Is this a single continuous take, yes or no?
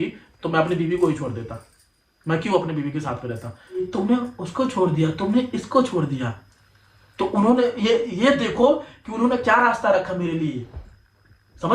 no